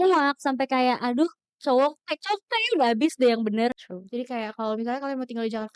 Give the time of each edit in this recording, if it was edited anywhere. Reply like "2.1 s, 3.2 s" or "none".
3.9 s